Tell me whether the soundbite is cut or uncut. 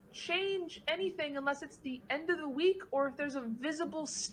uncut